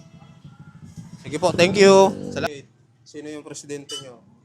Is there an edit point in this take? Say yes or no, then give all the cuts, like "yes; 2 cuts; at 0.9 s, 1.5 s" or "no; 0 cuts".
yes; 1 cut; at 2.5 s